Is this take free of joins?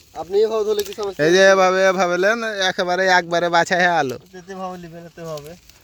yes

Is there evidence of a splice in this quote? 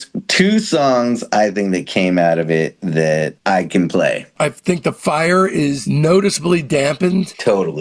yes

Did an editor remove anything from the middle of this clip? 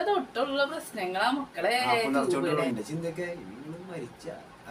yes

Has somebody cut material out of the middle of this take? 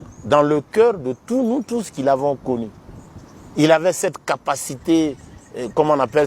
no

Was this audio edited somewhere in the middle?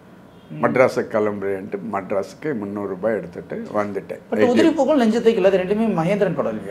no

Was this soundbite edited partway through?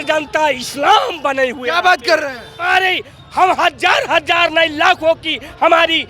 yes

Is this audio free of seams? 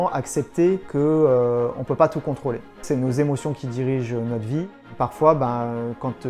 no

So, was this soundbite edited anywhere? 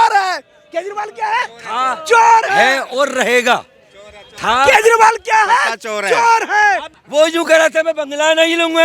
yes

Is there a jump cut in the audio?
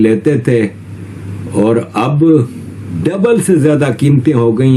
yes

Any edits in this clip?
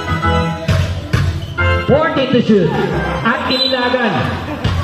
no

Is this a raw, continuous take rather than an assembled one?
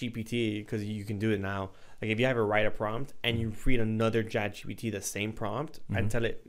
yes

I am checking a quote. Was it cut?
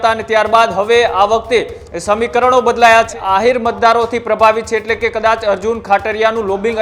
yes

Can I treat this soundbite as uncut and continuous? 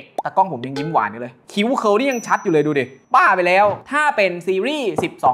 no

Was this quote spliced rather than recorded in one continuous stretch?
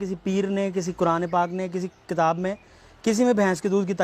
no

